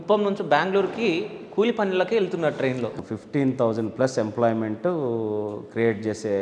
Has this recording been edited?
yes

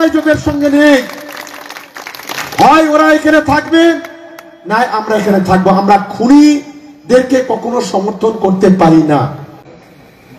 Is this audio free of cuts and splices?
yes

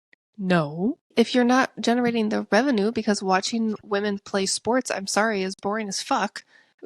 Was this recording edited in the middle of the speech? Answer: yes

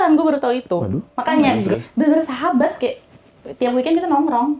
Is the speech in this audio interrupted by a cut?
yes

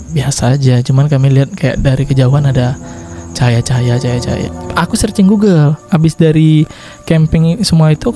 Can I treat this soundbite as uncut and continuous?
no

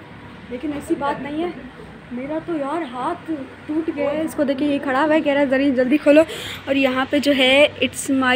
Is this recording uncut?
yes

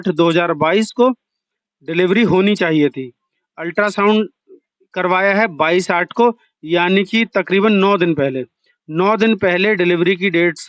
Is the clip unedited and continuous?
yes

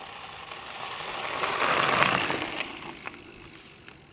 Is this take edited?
no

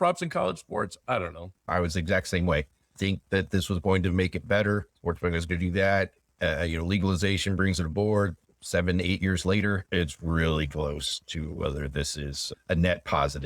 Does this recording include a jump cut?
yes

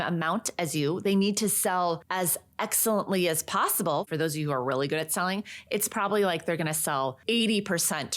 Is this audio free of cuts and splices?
no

